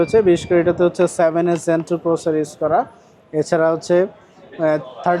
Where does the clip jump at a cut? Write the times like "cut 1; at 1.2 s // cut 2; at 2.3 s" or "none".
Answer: none

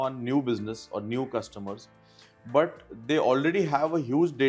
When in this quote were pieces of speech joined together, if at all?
none

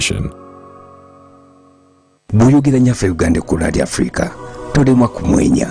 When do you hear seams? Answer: cut 1; at 2.1 s

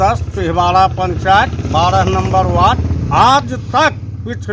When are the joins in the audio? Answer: cut 1; at 2.9 s

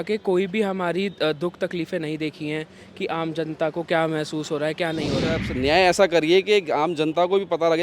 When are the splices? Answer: cut 1; at 5.3 s

